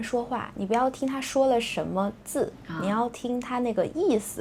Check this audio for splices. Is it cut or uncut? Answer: uncut